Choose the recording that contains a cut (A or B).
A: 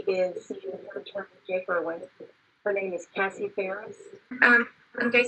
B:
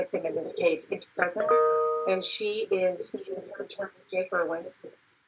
A